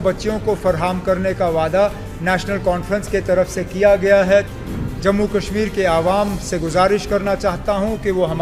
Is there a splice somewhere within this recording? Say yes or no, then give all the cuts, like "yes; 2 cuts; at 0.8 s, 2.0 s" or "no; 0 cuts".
yes; 1 cut; at 4.5 s